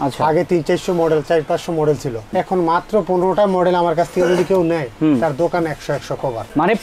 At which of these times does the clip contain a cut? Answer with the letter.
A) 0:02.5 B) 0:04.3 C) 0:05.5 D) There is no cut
D